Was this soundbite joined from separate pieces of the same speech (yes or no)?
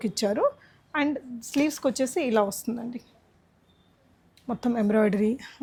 no